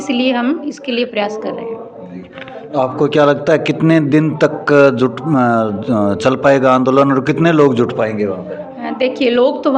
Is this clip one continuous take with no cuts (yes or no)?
yes